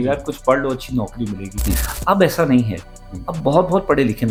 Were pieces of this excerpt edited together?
no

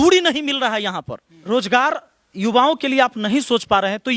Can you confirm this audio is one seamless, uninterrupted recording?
yes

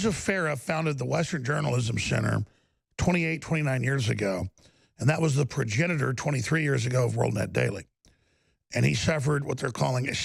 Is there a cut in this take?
no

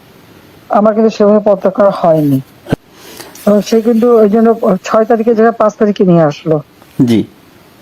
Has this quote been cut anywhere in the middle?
yes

